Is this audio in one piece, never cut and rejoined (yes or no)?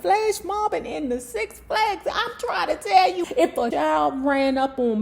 no